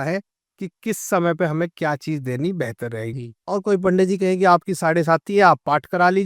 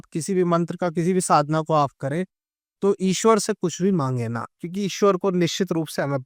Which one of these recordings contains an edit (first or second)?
first